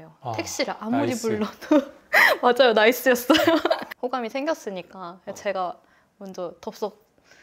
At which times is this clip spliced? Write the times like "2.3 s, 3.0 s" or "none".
3.9 s